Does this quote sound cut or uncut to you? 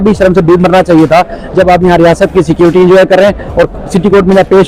uncut